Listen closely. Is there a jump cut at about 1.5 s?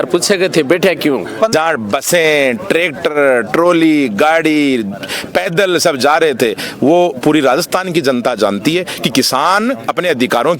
yes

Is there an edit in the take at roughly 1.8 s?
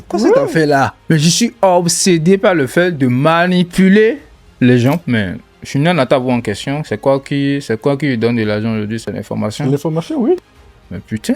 no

